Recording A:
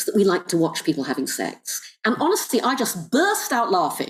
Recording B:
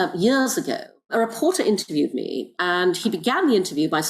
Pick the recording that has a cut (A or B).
B